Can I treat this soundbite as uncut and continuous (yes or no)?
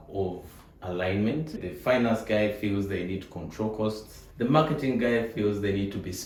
yes